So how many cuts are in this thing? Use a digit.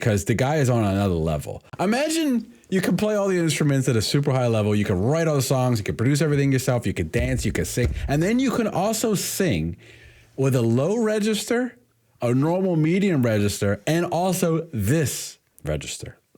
1